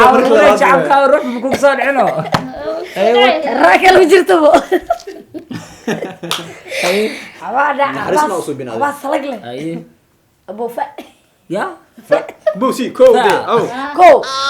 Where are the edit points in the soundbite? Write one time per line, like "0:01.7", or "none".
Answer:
0:07.4